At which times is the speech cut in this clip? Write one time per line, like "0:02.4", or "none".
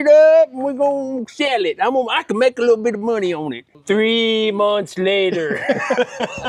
none